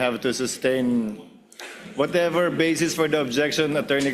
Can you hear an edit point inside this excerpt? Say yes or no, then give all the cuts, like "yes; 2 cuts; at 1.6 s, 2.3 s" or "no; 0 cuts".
no; 0 cuts